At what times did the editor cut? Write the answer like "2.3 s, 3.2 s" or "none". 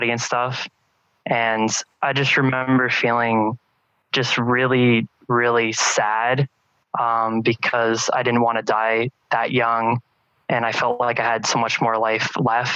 7.6 s